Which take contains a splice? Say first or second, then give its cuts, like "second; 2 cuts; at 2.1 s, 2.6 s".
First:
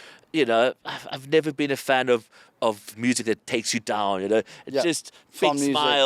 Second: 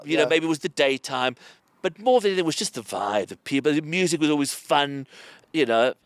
first; 1 cut; at 2.9 s